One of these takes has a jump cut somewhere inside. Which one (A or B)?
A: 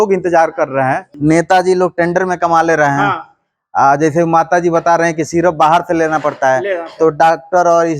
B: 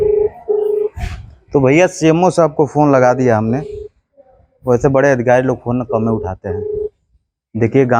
A